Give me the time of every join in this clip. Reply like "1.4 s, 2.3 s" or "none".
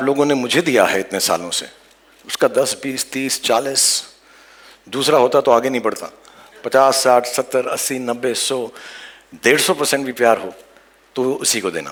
none